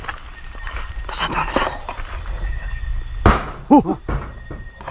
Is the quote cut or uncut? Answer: uncut